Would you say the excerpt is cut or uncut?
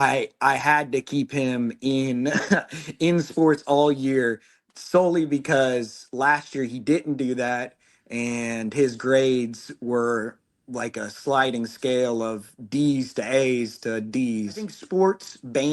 cut